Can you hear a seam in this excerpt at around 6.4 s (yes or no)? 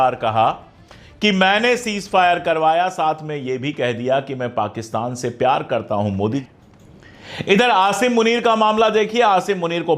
yes